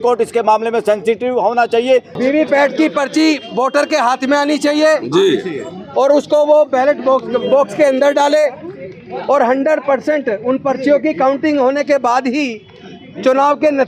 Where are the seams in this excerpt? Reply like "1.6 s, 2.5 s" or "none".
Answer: 2.2 s